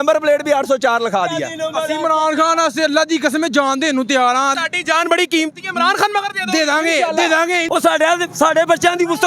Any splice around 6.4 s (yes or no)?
no